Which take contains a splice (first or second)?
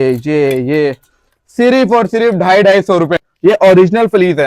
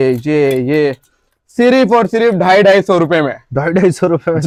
first